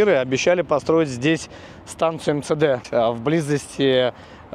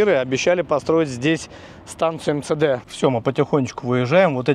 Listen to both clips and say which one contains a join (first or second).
second